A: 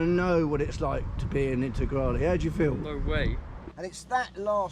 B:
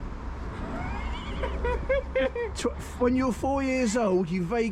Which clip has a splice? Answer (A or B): A